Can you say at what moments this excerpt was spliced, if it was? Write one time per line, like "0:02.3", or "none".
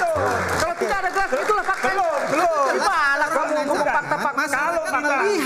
none